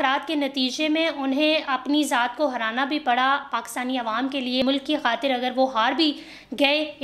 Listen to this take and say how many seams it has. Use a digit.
1